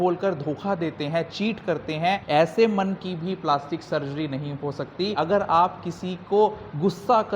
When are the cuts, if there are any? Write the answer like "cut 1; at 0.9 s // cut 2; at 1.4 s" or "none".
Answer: cut 1; at 2.2 s // cut 2; at 5.1 s